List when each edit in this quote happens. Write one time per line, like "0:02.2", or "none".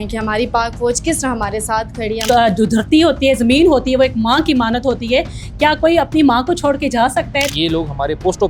0:02.2
0:07.5